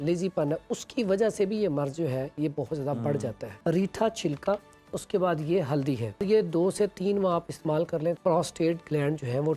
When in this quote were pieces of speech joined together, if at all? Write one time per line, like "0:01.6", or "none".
0:03.5
0:06.2
0:08.2